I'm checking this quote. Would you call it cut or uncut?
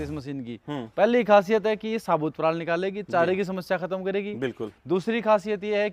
uncut